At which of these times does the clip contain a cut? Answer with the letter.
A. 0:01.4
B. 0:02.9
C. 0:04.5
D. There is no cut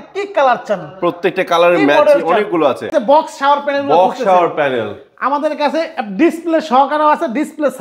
B